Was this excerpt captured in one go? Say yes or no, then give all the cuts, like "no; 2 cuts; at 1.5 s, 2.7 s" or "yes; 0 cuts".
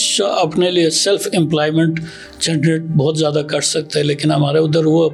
yes; 0 cuts